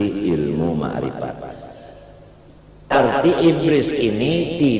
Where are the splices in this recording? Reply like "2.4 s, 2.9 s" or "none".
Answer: 2.9 s